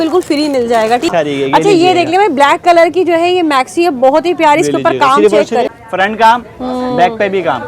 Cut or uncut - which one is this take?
cut